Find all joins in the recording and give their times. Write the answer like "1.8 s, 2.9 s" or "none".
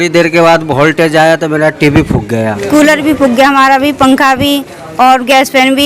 2.6 s